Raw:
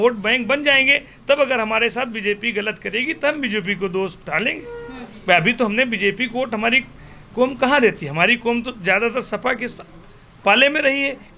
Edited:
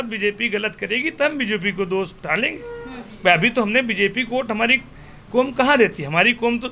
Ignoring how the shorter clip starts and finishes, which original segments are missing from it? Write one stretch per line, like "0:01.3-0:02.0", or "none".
none